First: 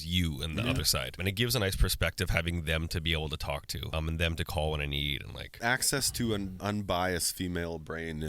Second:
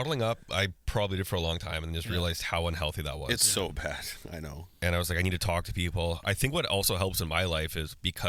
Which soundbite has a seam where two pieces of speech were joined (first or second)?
first